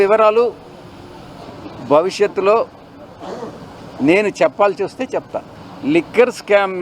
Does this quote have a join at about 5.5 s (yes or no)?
yes